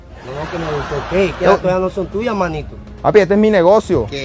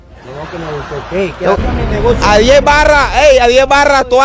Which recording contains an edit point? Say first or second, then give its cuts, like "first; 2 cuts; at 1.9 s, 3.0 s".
second; 1 cut; at 1.6 s